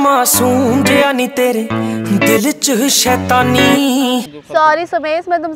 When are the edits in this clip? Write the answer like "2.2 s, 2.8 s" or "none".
4.4 s